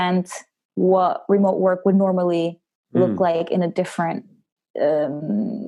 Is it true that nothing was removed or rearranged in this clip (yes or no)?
yes